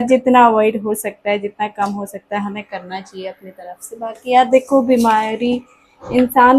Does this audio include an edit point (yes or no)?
no